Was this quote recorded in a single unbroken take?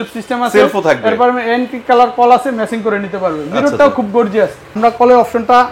no; 1 cut; at 4.7 s

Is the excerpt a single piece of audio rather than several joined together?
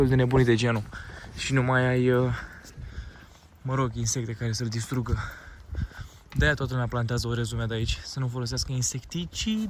yes; 0 cuts

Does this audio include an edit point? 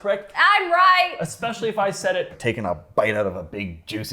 yes; 1 cut; at 2.4 s

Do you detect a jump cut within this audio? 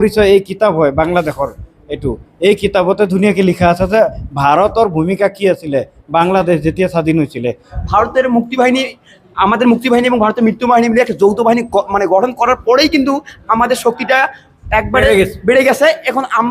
yes; 1 cut; at 7.7 s

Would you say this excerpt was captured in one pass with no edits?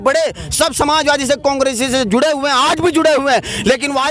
yes; 0 cuts

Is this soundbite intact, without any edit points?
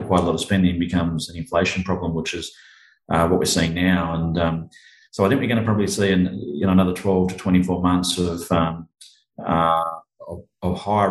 yes; 0 cuts

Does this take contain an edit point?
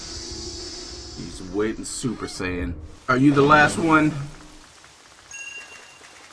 yes; 1 cut; at 2.9 s

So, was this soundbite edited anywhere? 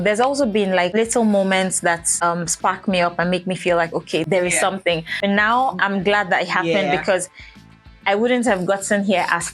yes; 4 cuts; at 0.9 s, 2.1 s, 4.2 s, 5.1 s

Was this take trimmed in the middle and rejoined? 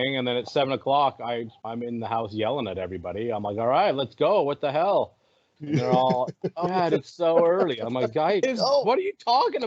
no; 0 cuts

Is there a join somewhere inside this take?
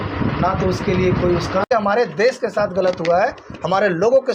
yes; 1 cut; at 1.7 s

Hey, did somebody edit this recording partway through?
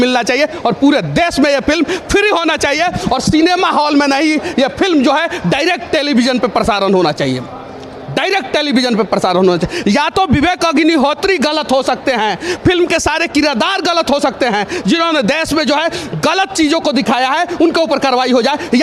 no; 0 cuts

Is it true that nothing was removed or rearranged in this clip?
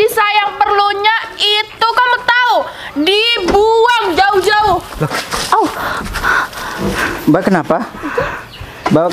yes; 0 cuts

